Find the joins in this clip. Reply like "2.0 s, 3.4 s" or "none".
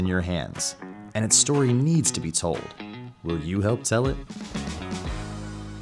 none